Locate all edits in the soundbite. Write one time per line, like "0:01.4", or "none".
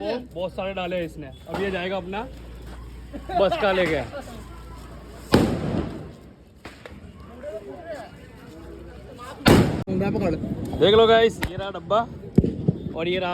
0:09.9